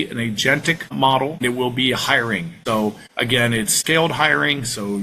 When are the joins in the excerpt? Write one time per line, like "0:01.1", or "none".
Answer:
0:03.3